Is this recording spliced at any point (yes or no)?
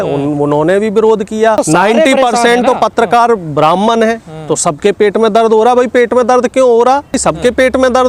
yes